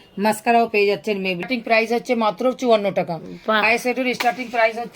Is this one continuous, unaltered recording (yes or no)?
no